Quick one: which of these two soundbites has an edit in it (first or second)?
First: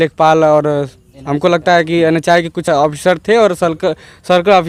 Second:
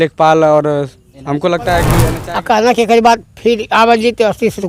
second